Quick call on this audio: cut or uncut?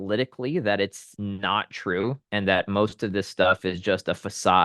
cut